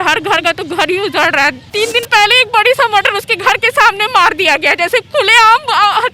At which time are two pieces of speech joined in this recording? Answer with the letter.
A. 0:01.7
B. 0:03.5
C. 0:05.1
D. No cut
A